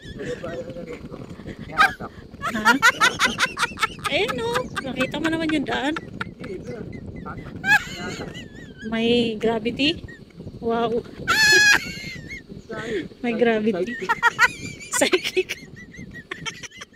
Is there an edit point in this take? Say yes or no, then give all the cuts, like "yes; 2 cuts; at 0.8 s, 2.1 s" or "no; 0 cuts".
no; 0 cuts